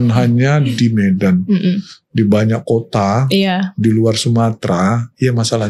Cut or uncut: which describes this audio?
uncut